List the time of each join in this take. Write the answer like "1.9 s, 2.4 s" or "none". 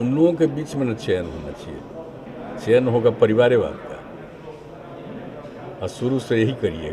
2.2 s